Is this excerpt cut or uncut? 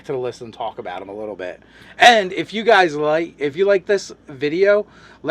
uncut